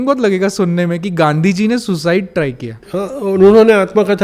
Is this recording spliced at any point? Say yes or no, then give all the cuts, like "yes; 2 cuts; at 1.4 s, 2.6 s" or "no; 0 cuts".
no; 0 cuts